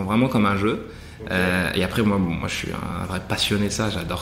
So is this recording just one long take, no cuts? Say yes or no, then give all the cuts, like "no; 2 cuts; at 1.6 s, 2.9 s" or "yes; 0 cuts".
yes; 0 cuts